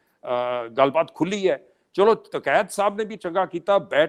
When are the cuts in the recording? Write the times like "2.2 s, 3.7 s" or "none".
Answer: none